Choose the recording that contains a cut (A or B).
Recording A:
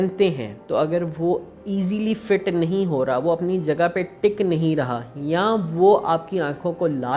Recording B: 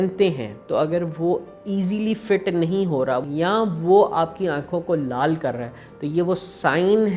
B